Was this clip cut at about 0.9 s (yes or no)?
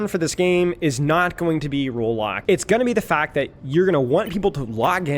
no